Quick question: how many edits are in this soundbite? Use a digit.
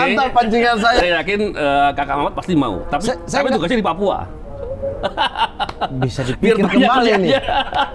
1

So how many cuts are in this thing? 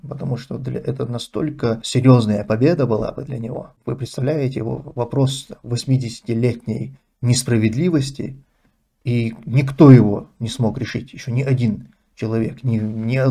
2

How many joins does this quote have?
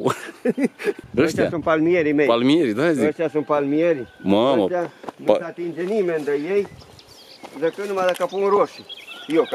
1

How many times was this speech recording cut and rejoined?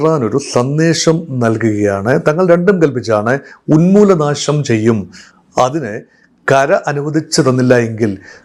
0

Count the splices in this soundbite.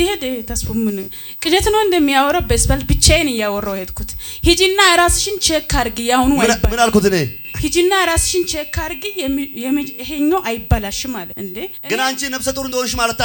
1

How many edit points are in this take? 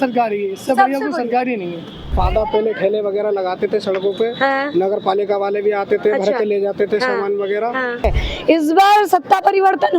2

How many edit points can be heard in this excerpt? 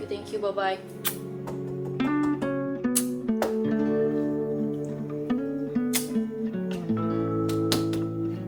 0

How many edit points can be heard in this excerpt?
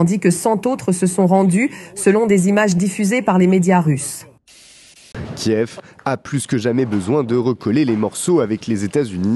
1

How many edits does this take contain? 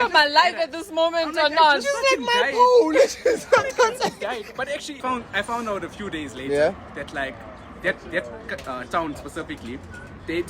1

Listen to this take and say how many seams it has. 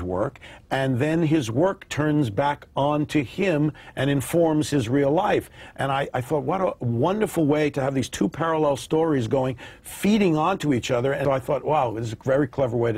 1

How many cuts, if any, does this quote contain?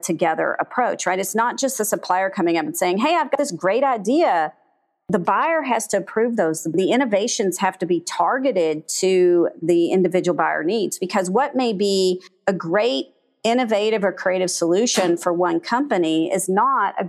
0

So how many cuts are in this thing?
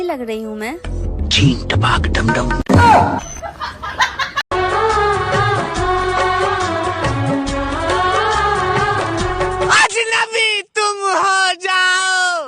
1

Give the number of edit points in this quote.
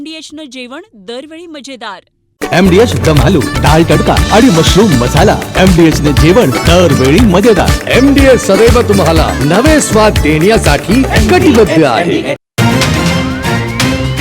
1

